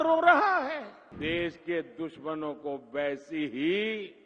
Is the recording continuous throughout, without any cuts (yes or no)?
no